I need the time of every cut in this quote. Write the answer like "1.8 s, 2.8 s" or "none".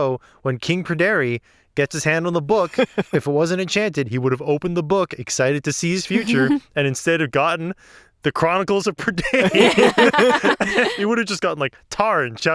10.9 s